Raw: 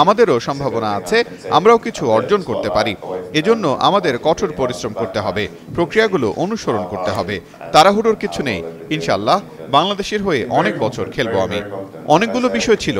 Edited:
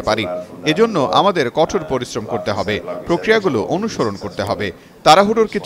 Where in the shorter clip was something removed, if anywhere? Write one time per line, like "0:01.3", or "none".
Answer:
none